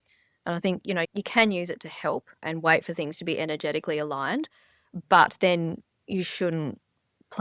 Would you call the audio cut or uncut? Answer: cut